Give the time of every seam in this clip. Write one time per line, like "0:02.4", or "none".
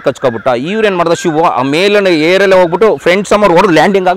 none